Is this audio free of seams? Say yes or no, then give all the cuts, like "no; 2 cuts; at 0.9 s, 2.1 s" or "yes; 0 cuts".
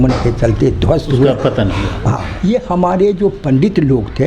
no; 1 cut; at 2.3 s